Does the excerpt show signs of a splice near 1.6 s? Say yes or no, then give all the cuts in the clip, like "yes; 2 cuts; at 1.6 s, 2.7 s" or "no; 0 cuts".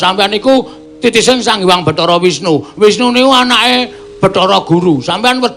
yes; 1 cut; at 1.6 s